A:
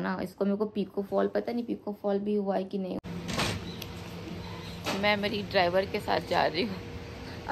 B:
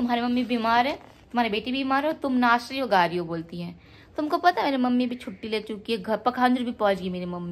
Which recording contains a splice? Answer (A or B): A